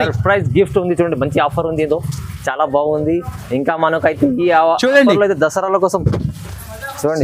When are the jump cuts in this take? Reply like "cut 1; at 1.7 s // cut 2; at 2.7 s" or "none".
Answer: none